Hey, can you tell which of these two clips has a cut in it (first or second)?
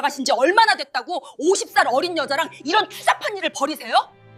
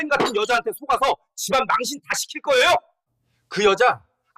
second